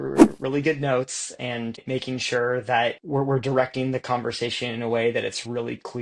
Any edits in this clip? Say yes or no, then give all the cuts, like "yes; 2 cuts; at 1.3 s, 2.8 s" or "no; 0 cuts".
yes; 2 cuts; at 1.8 s, 3.0 s